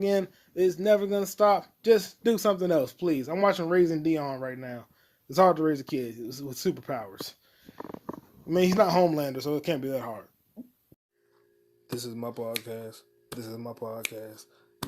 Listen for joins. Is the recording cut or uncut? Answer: cut